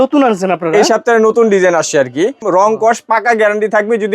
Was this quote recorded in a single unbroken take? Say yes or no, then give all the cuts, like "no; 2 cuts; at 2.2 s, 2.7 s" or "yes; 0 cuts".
no; 1 cut; at 2.4 s